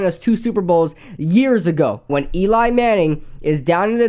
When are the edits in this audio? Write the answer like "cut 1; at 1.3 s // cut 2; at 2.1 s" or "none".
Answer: cut 1; at 2.1 s

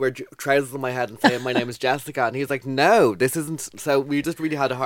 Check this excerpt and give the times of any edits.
none

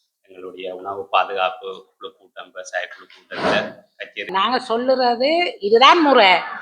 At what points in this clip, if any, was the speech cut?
cut 1; at 4.3 s

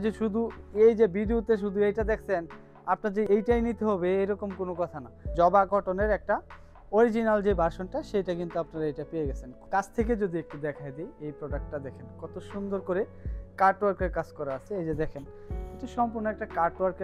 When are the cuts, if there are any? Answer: cut 1; at 5.2 s // cut 2; at 9.5 s // cut 3; at 14.6 s

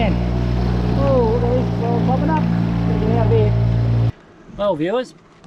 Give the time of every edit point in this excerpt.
cut 1; at 4.1 s

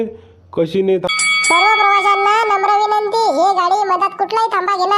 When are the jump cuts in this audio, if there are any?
cut 1; at 1.1 s

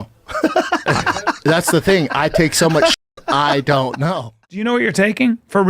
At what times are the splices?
cut 1; at 4.4 s

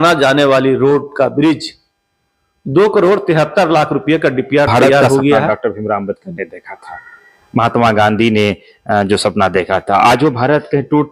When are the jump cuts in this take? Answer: cut 1; at 5.4 s

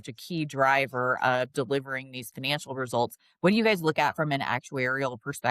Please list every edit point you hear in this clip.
none

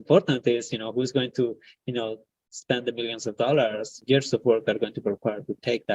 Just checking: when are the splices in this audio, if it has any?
cut 1; at 3.9 s

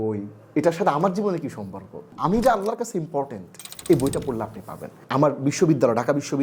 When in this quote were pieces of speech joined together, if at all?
cut 1; at 2.1 s // cut 2; at 4.9 s

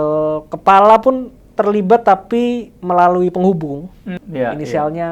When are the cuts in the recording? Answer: cut 1; at 4.2 s

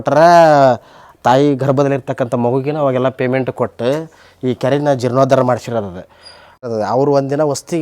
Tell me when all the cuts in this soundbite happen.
cut 1; at 6.6 s

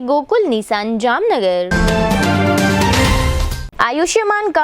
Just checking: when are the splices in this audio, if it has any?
cut 1; at 1.7 s // cut 2; at 3.5 s

